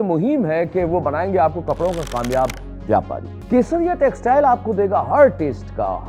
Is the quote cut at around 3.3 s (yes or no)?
yes